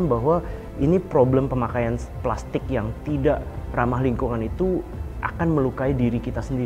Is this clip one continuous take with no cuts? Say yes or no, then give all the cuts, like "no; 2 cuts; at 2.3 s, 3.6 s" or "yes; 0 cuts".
yes; 0 cuts